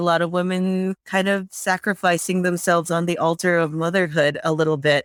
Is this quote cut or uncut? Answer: uncut